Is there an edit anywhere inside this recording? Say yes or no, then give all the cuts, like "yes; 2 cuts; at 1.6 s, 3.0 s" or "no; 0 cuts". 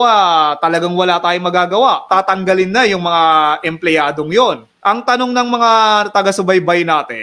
yes; 2 cuts; at 2.0 s, 4.7 s